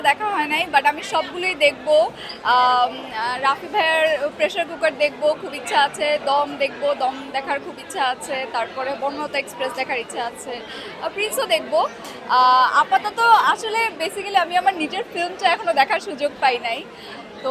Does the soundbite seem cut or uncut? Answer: uncut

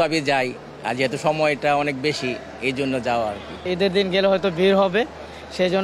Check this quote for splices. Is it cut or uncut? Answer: uncut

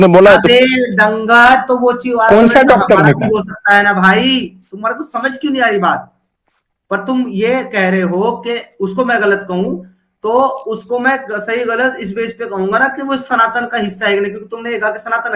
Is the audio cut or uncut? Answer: uncut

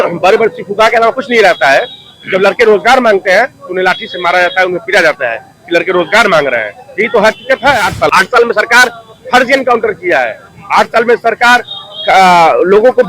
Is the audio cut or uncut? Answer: cut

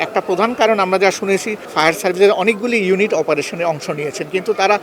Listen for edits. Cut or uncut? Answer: cut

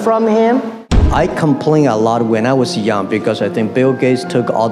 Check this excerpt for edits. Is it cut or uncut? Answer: cut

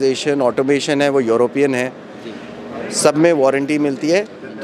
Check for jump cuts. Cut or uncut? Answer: uncut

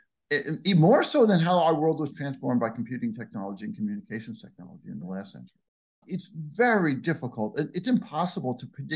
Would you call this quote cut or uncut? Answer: cut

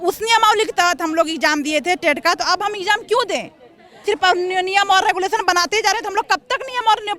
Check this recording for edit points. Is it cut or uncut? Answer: cut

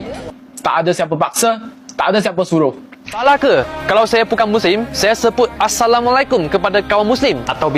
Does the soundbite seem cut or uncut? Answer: cut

